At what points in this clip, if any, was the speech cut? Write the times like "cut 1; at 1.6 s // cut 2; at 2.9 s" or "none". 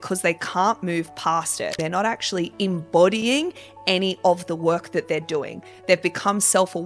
cut 1; at 1.7 s